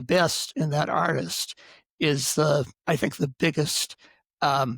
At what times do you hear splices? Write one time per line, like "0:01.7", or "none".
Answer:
none